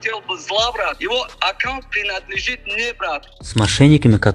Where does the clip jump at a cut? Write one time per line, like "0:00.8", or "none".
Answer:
0:01.0
0:03.3